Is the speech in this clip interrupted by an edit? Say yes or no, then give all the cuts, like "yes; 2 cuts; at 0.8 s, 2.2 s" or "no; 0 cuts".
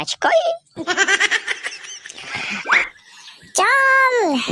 yes; 1 cut; at 2.6 s